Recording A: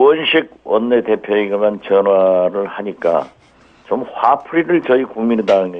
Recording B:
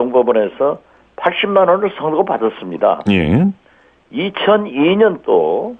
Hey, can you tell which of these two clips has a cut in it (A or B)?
A